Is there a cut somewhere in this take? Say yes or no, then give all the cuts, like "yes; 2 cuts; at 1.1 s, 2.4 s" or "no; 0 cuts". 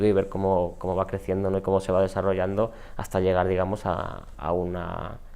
no; 0 cuts